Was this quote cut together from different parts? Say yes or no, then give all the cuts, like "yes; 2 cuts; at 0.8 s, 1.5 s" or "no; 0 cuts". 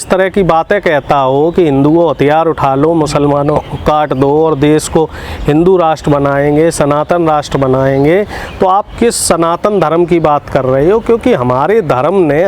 no; 0 cuts